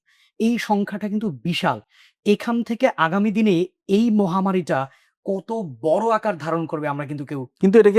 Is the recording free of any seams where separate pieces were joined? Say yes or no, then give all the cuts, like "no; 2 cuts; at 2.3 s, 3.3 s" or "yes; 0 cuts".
yes; 0 cuts